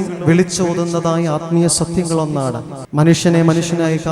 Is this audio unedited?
no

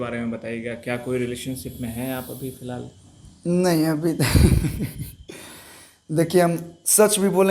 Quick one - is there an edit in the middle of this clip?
no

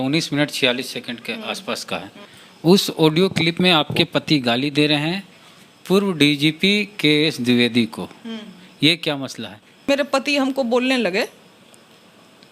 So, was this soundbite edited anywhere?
yes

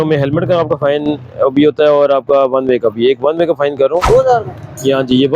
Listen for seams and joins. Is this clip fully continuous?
no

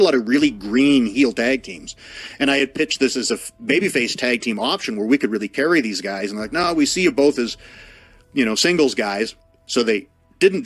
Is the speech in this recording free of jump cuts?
yes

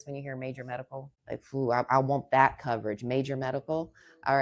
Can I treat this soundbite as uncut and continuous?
no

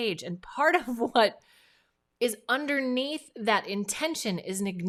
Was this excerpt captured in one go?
yes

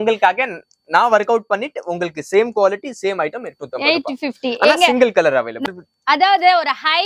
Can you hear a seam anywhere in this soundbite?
yes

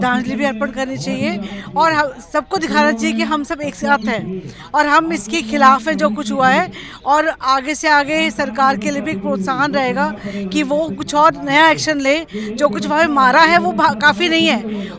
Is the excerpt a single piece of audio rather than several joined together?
yes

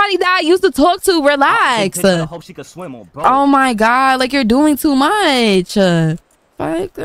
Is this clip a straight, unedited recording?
yes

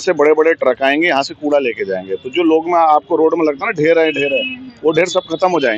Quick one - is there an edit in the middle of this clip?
no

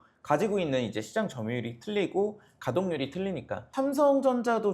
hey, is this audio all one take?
no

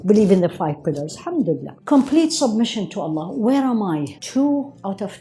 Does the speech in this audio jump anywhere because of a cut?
yes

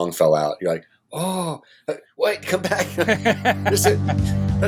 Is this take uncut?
yes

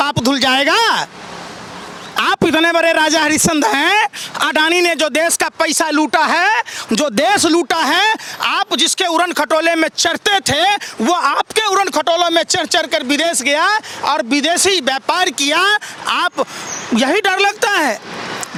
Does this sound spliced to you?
no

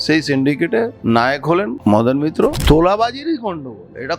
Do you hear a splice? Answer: yes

